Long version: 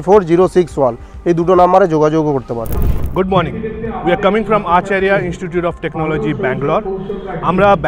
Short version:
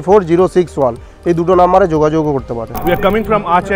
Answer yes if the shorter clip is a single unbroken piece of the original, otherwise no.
no